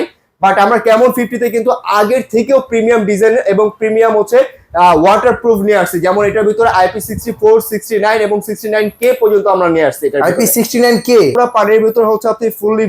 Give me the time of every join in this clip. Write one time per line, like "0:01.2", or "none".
0:11.3

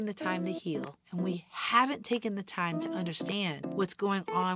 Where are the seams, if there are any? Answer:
0:01.0
0:03.6

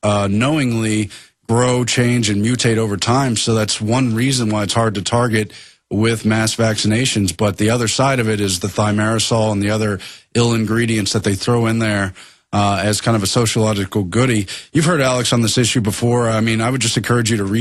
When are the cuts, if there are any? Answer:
none

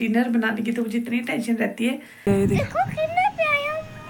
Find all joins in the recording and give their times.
0:02.2

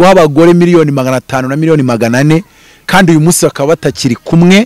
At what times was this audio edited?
none

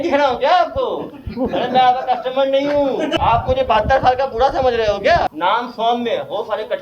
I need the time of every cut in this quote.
0:03.2
0:05.3

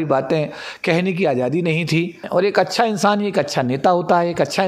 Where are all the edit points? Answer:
0:02.2

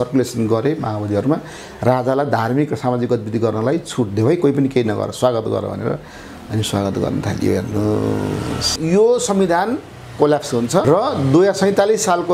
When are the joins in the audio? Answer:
0:08.8
0:10.8

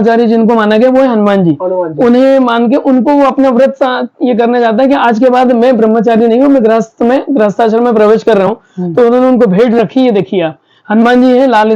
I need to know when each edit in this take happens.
none

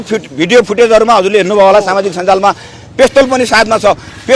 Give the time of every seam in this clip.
none

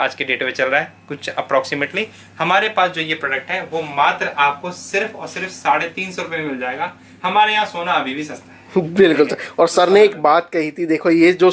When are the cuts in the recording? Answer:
none

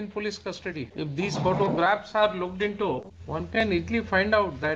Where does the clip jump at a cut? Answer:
0:00.9
0:03.1

